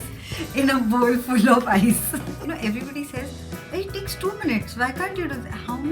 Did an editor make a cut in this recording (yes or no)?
yes